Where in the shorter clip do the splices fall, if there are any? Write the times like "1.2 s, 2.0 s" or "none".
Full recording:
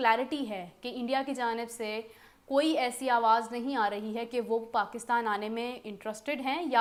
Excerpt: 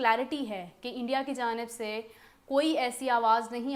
none